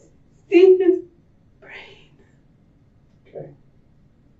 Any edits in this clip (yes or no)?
no